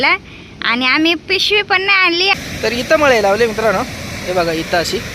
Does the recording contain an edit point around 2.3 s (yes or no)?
yes